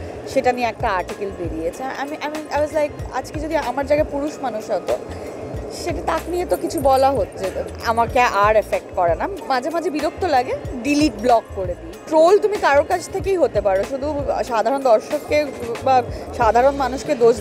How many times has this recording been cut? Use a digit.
0